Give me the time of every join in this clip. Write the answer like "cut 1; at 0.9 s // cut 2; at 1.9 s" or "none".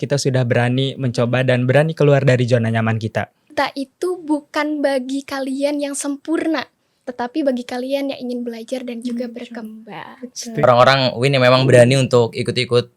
cut 1; at 3.5 s // cut 2; at 10.6 s